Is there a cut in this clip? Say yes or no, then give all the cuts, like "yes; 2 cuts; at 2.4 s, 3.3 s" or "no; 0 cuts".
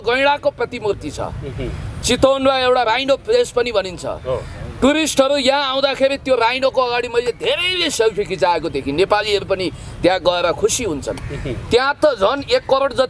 no; 0 cuts